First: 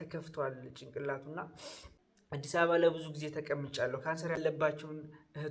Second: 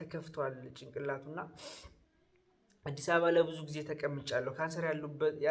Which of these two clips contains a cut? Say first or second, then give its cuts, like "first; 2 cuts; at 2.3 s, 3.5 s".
first; 2 cuts; at 2.6 s, 4.4 s